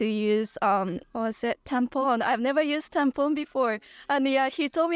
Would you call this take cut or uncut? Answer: uncut